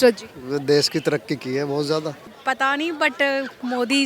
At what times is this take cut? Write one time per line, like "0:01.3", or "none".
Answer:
0:02.2